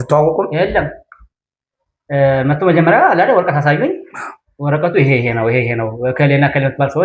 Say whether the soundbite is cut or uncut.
uncut